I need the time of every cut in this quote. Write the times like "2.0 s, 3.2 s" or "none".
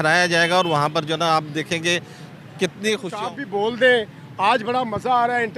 3.1 s